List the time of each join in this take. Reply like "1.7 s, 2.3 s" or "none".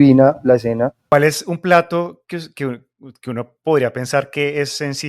1.0 s